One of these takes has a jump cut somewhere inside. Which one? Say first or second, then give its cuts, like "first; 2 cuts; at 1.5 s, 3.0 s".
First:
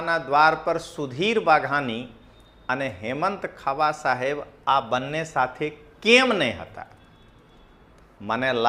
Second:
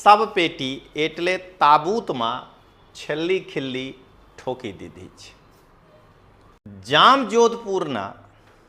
second; 1 cut; at 6.7 s